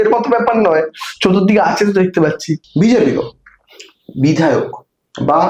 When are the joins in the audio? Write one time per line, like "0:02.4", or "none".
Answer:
0:02.6